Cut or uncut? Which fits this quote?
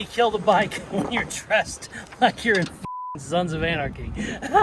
uncut